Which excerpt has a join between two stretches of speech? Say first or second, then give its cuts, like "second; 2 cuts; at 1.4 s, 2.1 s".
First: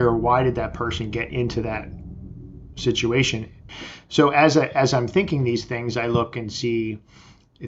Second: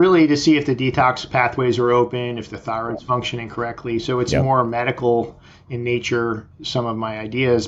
first; 1 cut; at 3.6 s